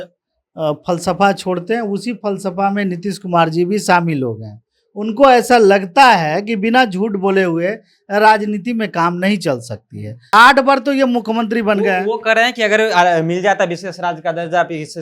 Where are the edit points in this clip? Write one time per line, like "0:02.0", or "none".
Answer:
0:10.3